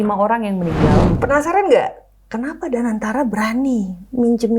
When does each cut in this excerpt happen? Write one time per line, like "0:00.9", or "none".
0:01.2